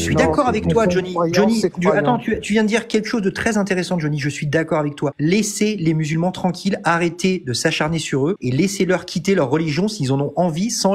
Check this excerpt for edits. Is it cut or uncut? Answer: cut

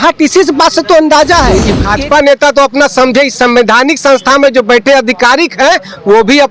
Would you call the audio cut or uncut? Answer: cut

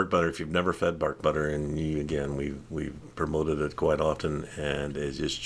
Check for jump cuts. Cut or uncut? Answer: uncut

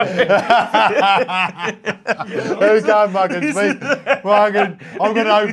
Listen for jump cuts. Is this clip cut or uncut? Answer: uncut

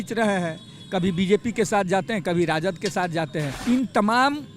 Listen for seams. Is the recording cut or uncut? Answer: cut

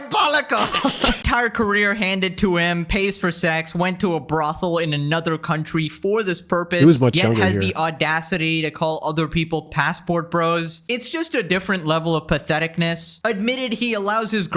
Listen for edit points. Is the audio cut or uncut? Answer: cut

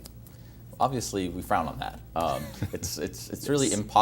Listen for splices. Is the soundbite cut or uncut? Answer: cut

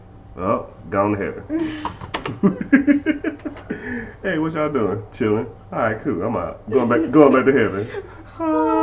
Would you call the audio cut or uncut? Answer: uncut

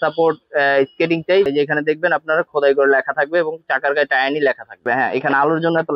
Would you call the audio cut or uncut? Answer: cut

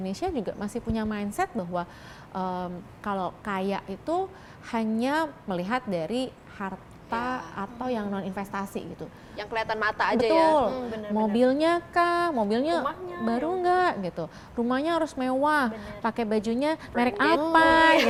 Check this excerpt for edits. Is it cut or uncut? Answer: uncut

